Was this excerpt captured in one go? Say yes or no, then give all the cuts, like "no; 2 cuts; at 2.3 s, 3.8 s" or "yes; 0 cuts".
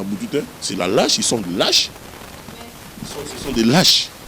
yes; 0 cuts